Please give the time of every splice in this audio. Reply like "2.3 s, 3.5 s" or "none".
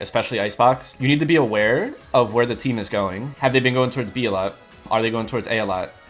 1.0 s, 3.2 s, 4.9 s